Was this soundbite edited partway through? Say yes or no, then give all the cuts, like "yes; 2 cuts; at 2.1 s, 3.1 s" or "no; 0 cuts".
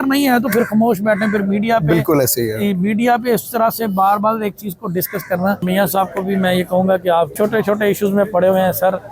yes; 2 cuts; at 5.6 s, 7.3 s